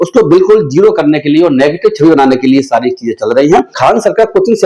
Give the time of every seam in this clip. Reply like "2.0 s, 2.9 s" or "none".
3.7 s